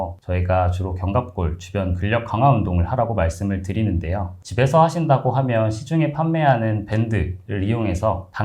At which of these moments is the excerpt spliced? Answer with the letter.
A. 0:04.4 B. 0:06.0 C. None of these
A